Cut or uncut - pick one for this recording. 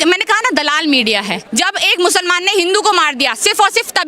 cut